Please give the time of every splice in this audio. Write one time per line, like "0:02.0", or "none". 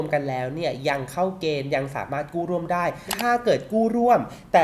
0:03.1